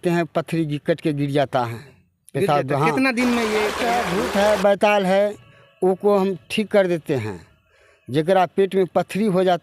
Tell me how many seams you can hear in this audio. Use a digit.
1